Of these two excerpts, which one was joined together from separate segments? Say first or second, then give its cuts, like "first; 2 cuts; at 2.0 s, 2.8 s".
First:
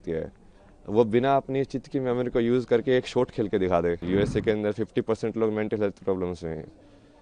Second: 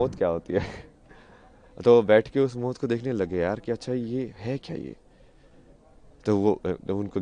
first; 1 cut; at 4.0 s